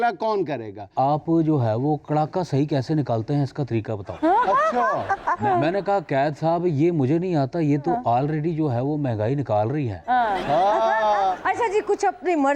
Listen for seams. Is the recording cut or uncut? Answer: cut